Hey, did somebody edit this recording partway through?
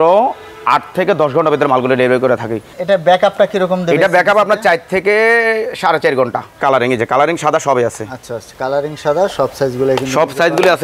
yes; 2 cuts; at 2.8 s, 6.6 s

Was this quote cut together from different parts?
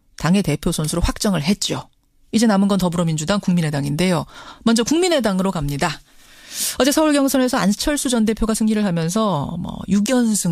no; 0 cuts

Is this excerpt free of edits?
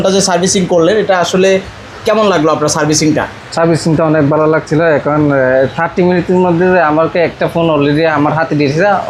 yes; 0 cuts

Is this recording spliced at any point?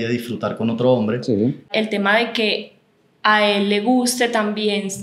yes; 1 cut; at 1.7 s

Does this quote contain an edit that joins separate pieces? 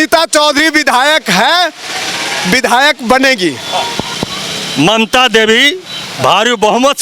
no; 0 cuts

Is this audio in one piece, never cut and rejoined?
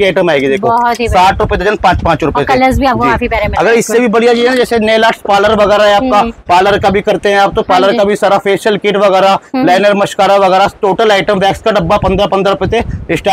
yes; 0 cuts

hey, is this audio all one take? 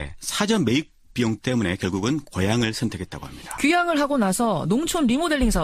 no; 1 cut; at 3.4 s

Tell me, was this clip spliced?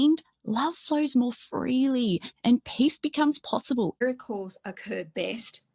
yes; 1 cut; at 4.0 s

